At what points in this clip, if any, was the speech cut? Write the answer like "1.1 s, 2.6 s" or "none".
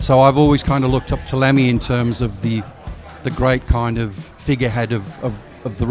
none

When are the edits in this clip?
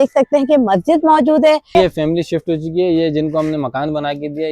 1.7 s

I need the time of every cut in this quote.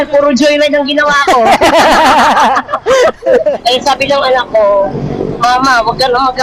3.6 s

